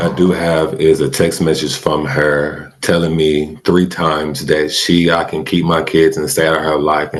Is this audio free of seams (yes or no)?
yes